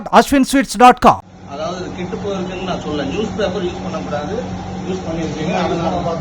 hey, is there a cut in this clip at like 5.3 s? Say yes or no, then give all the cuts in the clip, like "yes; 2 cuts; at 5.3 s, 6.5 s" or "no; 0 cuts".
no; 1 cut; at 1.3 s